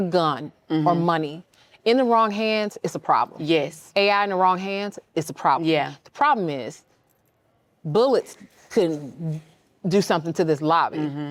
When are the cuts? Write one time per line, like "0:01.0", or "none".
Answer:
none